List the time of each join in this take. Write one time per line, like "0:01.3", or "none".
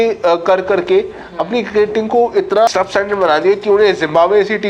0:02.7

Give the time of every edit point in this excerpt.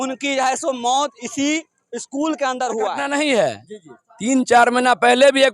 0:03.0

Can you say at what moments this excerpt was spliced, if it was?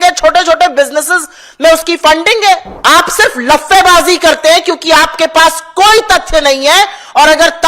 0:02.7

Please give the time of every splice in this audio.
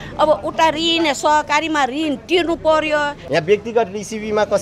0:03.2

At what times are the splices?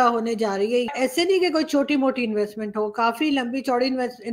0:00.9

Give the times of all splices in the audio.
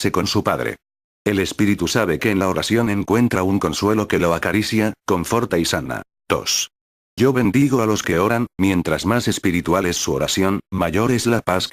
0:01.4

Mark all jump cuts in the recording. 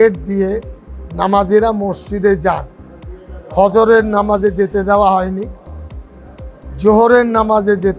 none

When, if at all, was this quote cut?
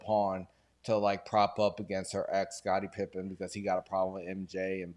none

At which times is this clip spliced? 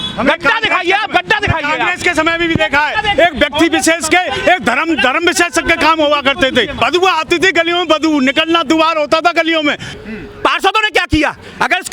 0:06.8
0:09.9

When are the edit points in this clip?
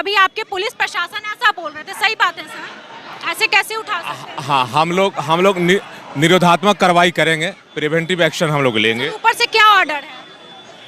none

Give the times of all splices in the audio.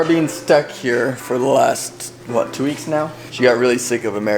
0:03.2

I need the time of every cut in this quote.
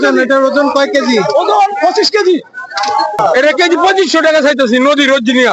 0:03.2

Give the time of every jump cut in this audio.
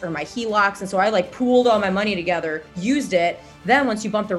0:02.7
0:03.5

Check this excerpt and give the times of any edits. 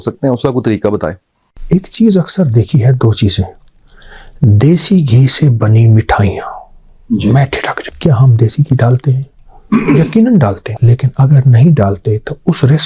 none

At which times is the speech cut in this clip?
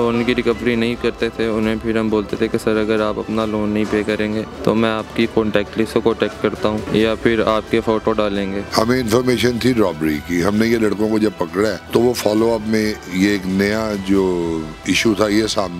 0:04.5
0:06.8
0:08.6
0:11.8

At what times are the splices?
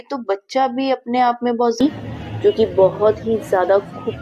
0:01.8

